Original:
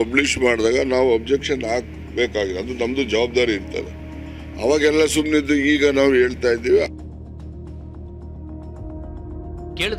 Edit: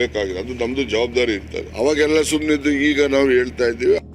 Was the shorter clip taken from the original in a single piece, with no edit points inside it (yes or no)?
no